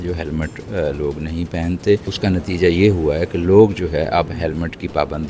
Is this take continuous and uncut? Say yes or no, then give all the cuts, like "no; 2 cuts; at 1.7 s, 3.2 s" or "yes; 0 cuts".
no; 1 cut; at 2.1 s